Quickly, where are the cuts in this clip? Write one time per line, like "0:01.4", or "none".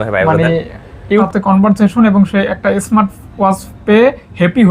0:01.3